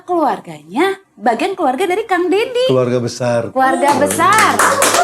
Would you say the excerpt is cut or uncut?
uncut